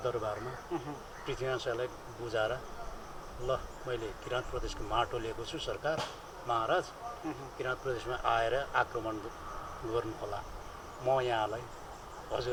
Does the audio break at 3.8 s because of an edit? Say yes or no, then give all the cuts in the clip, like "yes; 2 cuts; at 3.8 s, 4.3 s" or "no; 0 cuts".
no; 0 cuts